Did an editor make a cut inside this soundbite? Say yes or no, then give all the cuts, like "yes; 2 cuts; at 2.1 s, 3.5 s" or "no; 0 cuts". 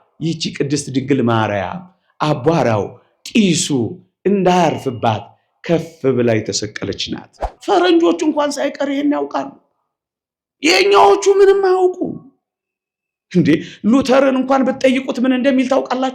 yes; 1 cut; at 7.4 s